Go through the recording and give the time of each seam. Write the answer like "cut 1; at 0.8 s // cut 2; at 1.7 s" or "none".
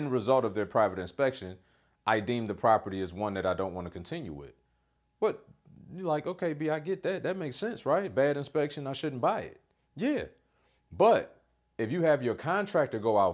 none